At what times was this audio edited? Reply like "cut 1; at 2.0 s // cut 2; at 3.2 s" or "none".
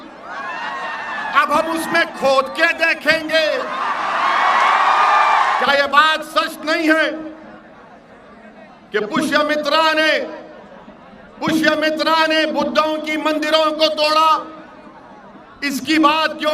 cut 1; at 5.6 s